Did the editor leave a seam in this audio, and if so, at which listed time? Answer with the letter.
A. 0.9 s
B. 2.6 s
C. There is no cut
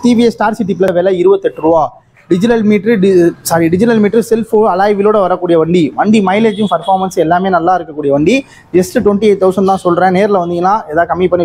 A